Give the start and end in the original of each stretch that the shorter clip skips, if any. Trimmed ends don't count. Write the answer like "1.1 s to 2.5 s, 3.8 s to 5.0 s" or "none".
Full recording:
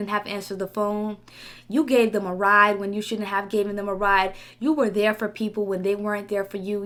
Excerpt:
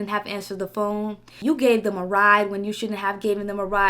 1.3 s to 1.5 s

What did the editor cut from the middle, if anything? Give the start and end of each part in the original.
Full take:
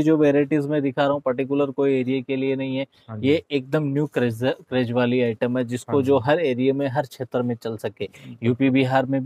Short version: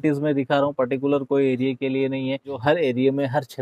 3.1 s to 6.2 s

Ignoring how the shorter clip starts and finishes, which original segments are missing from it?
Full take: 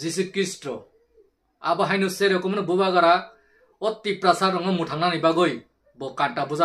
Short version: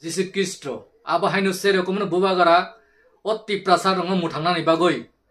0.9 s to 1.5 s

